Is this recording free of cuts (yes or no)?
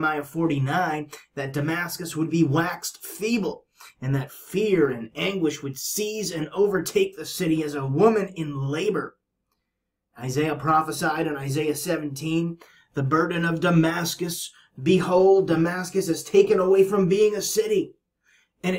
yes